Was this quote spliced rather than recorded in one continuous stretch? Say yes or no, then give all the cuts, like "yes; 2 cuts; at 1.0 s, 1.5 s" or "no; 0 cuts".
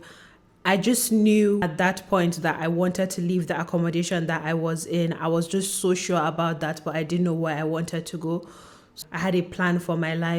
no; 0 cuts